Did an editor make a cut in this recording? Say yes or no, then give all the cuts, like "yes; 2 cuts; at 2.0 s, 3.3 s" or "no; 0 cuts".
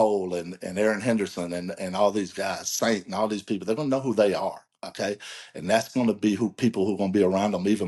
no; 0 cuts